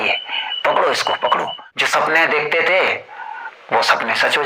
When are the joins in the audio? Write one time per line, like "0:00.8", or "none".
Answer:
0:01.6